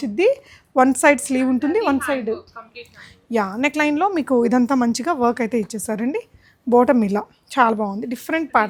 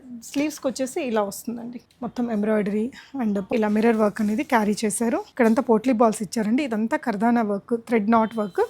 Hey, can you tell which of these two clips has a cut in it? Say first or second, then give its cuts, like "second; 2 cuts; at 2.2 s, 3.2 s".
second; 3 cuts; at 1.8 s, 3.5 s, 5.3 s